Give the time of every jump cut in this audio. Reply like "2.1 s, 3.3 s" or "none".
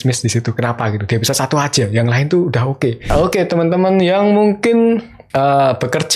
3.1 s